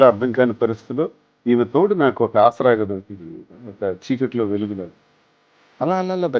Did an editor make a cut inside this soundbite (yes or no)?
no